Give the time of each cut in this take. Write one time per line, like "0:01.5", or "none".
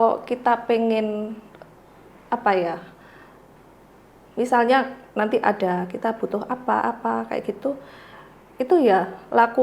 none